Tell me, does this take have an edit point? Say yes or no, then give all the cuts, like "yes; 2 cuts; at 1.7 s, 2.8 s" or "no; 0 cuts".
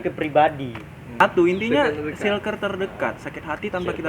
yes; 1 cut; at 1.2 s